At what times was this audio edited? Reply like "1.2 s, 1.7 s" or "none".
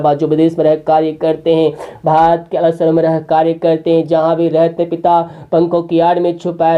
none